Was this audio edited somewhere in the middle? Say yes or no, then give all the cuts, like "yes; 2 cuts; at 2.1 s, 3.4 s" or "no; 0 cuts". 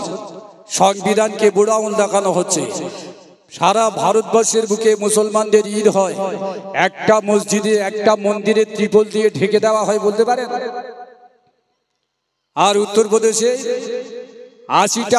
no; 0 cuts